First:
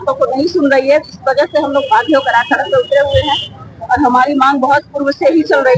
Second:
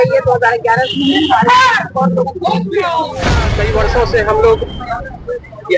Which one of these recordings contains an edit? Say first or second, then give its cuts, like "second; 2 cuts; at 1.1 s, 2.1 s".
second; 1 cut; at 3.6 s